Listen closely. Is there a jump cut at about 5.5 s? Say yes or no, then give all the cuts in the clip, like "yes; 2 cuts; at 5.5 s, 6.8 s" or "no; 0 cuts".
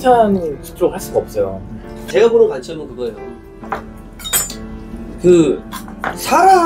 no; 1 cut; at 2.0 s